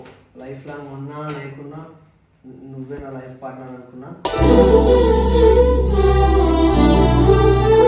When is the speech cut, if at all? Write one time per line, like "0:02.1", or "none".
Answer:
none

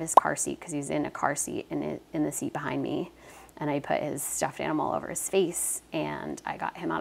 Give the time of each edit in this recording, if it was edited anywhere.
none

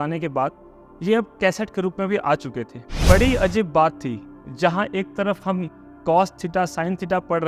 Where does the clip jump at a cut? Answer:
0:03.1

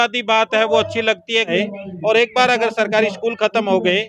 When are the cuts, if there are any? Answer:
0:01.5

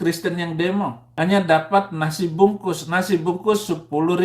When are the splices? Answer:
0:01.0

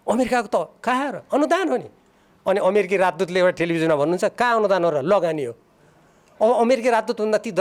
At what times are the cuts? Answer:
none

